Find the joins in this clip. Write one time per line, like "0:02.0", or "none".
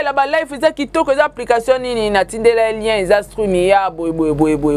none